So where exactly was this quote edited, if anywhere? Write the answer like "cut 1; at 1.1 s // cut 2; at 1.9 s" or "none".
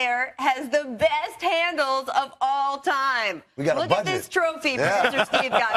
none